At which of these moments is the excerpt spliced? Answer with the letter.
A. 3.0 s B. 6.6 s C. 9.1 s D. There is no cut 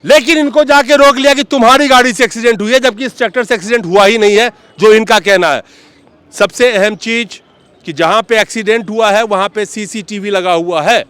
D